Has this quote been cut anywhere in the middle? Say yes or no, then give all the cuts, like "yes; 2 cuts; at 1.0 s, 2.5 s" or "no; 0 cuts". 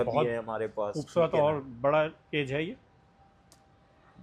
no; 0 cuts